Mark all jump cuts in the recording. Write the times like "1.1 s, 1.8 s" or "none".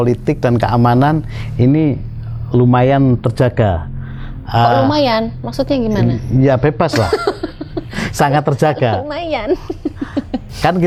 none